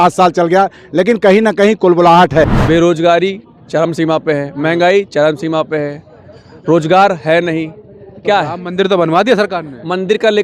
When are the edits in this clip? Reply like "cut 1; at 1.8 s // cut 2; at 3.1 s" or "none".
cut 1; at 2.6 s